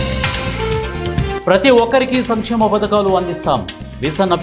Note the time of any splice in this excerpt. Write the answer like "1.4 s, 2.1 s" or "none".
1.4 s